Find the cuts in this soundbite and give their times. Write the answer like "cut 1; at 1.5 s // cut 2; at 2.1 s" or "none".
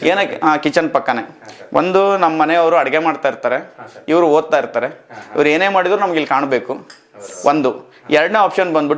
none